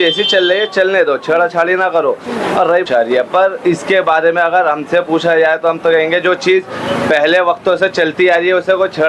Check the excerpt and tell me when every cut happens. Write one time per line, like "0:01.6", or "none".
0:02.8